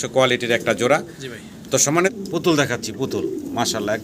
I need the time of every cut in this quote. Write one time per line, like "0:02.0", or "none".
0:02.1